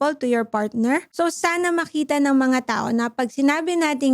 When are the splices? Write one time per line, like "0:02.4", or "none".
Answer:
0:01.1

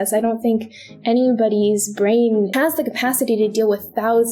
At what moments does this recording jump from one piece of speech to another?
0:02.5

